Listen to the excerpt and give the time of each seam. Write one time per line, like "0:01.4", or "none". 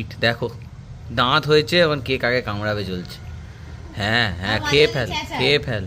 none